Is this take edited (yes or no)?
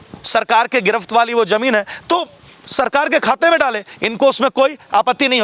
no